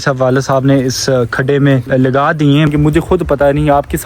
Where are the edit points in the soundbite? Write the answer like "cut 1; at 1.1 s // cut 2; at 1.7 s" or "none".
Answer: cut 1; at 1.8 s // cut 2; at 2.7 s